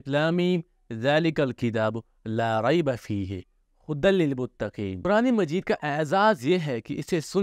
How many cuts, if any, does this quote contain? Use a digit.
1